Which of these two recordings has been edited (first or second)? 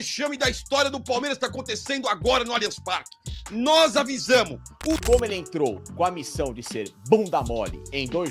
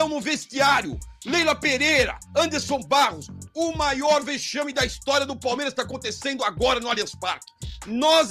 first